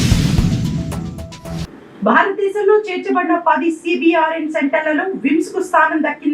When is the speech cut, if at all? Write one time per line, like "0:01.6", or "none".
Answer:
0:01.2